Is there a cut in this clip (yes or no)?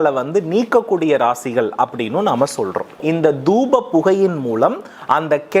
yes